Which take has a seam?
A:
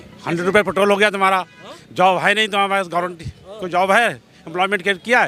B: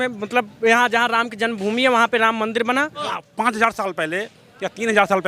B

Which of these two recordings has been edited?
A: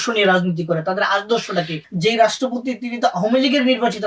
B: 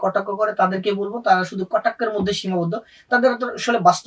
A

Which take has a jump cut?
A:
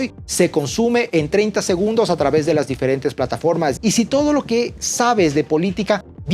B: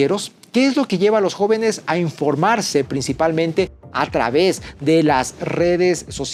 A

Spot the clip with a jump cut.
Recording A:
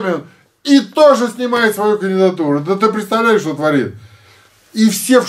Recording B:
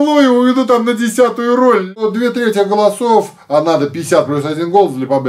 B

